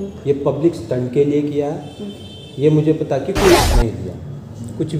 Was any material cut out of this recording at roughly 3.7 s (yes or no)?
yes